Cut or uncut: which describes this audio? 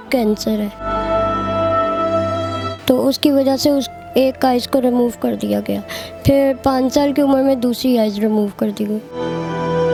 uncut